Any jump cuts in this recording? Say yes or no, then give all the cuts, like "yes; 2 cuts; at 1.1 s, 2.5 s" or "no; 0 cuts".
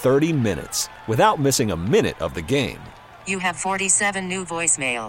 no; 0 cuts